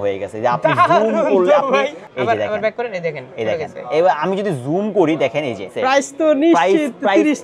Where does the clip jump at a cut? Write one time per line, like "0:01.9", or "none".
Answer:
0:02.0
0:05.7